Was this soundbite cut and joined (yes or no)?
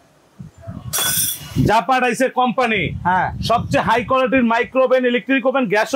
no